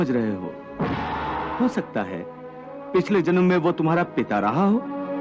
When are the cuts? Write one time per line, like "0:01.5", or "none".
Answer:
0:01.5